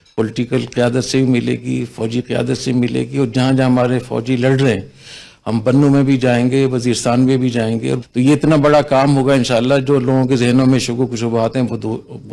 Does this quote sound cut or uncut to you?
uncut